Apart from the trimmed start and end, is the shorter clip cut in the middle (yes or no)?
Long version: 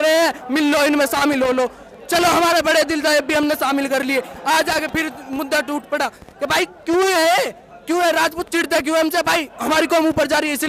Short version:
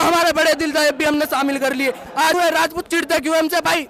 yes